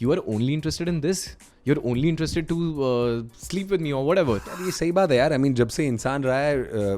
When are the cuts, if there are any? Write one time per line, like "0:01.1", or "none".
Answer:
0:04.4